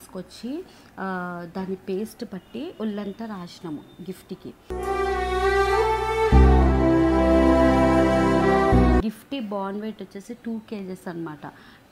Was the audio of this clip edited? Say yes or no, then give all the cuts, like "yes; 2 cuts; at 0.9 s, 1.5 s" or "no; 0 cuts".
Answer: yes; 1 cut; at 9.0 s